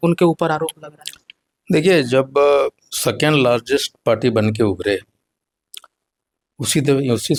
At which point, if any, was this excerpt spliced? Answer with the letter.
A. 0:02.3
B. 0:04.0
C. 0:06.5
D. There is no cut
D